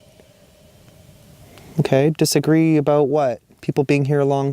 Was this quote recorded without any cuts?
no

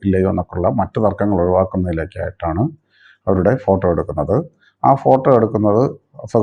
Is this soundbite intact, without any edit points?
yes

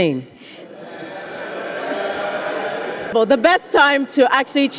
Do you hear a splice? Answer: yes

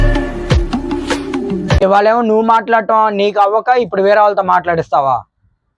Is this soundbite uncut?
no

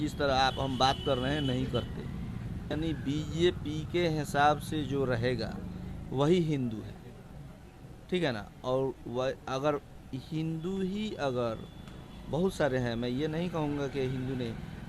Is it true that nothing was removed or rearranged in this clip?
no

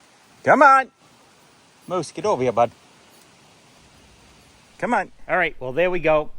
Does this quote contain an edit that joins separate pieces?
yes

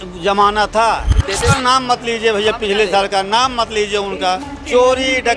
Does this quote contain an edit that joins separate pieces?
yes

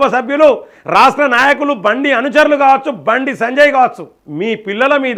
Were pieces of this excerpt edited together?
no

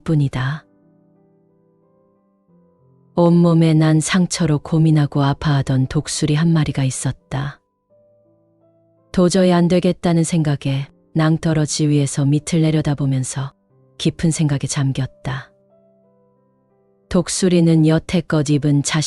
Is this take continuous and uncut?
no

